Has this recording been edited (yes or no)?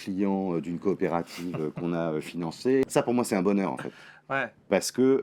yes